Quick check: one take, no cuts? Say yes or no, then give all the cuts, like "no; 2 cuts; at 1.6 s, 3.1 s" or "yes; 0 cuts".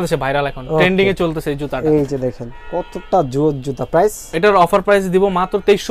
yes; 0 cuts